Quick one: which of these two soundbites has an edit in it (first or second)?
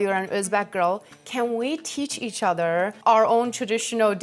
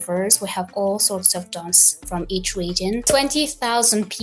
second